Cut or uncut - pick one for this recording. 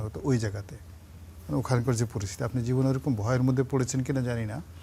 uncut